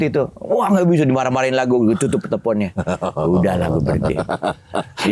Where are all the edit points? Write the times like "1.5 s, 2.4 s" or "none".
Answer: none